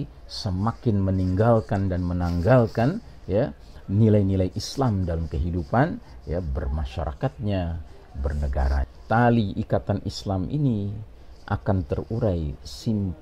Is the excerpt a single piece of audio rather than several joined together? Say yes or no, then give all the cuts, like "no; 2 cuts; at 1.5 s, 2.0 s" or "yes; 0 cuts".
no; 1 cut; at 8.9 s